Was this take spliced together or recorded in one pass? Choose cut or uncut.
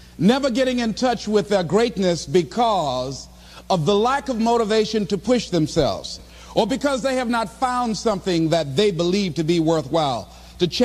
cut